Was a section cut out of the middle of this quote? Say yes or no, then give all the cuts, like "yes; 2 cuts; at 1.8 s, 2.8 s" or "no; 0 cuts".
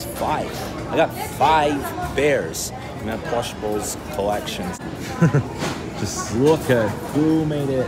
yes; 1 cut; at 4.8 s